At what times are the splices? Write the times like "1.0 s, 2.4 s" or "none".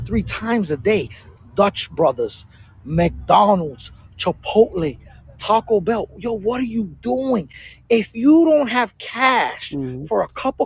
none